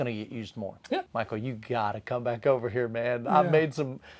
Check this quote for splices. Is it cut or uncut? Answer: cut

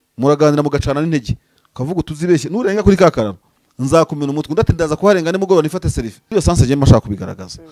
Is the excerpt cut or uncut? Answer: cut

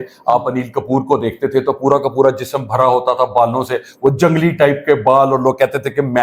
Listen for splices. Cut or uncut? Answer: uncut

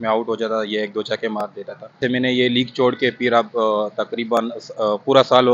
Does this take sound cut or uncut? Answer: cut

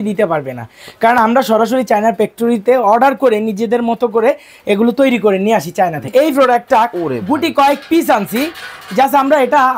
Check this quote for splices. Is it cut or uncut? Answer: cut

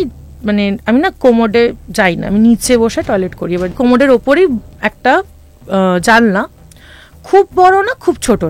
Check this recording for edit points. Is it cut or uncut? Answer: cut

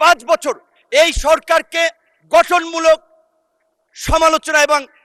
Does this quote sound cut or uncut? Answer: uncut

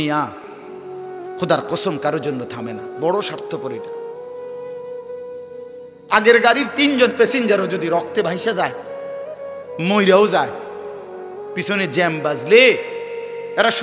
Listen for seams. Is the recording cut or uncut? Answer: cut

